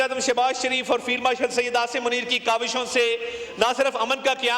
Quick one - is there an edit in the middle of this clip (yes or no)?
no